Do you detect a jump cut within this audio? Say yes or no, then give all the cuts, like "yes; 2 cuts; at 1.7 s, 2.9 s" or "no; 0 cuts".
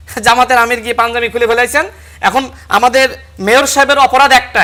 no; 0 cuts